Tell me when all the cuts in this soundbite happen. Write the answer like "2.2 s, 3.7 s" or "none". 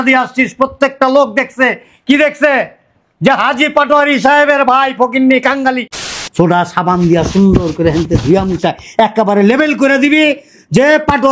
6.0 s